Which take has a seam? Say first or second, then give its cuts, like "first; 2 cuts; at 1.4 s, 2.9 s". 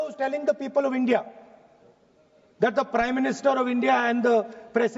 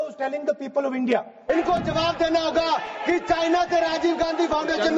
second; 1 cut; at 1.4 s